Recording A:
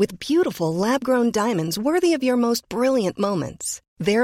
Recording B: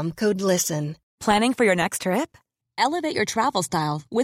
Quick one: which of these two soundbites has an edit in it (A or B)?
B